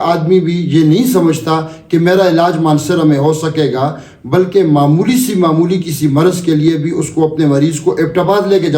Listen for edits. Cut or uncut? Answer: uncut